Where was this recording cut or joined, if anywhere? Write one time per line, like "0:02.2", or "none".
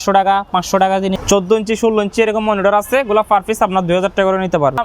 0:01.1